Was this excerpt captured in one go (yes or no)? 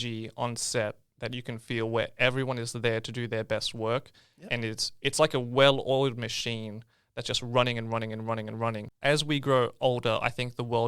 no